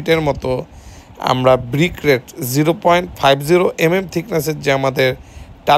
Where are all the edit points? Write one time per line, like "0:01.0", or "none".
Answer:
none